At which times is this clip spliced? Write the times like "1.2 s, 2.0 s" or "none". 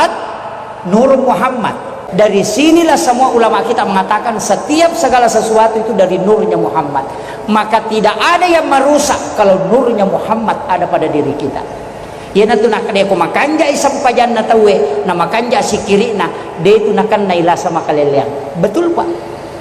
2.0 s